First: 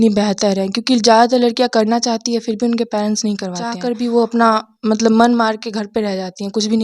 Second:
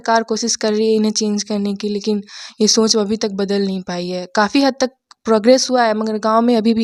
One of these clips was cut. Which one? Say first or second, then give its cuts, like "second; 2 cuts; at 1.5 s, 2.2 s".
first; 1 cut; at 3.8 s